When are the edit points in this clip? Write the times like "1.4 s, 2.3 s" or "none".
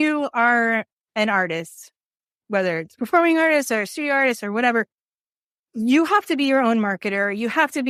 none

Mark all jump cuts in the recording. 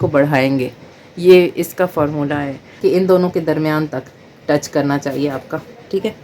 2.8 s

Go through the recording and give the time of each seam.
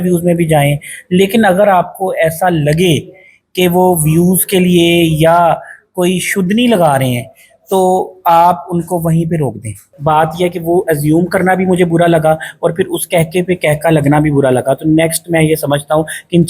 9.8 s

